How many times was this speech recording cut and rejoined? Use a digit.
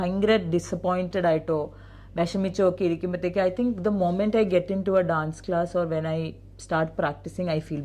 0